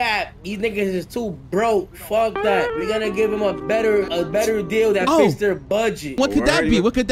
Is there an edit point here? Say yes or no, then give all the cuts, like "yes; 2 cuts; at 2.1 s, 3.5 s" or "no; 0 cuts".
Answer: yes; 3 cuts; at 2.7 s, 4.1 s, 6.1 s